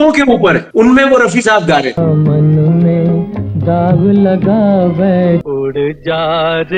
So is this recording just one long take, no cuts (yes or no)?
no